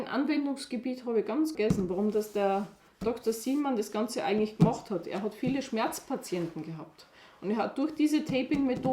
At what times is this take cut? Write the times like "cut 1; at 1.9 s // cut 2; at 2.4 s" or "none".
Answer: cut 1; at 1.5 s